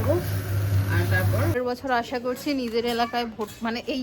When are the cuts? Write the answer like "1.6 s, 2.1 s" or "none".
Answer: 1.5 s